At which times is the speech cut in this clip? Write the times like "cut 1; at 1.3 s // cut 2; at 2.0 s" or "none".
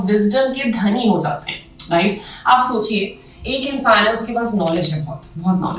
none